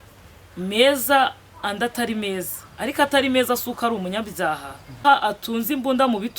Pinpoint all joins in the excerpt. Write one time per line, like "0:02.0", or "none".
0:05.0